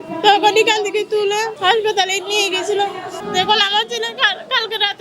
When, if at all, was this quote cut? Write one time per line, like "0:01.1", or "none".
0:01.5
0:03.2